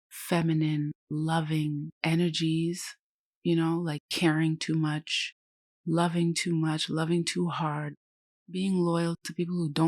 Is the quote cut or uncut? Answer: uncut